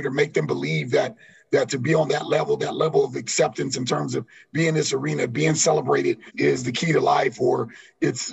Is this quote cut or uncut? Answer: cut